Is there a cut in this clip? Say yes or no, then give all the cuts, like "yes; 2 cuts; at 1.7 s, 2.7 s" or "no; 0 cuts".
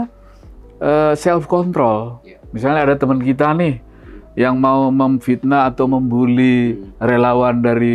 no; 0 cuts